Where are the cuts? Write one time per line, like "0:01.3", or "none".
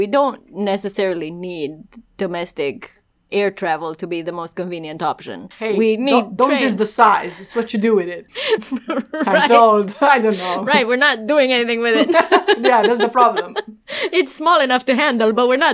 none